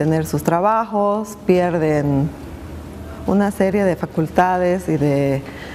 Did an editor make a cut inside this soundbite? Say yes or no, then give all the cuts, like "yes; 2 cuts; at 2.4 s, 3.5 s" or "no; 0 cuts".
yes; 1 cut; at 3.4 s